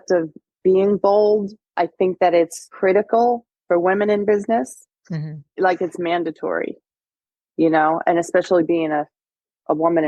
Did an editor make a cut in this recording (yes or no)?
yes